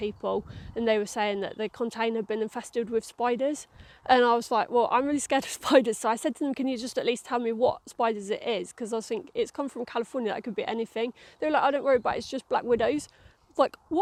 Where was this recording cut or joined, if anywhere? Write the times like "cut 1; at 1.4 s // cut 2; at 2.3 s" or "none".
none